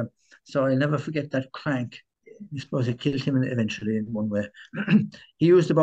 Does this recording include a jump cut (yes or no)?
yes